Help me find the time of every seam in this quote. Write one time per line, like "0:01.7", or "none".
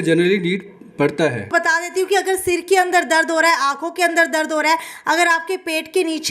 0:01.5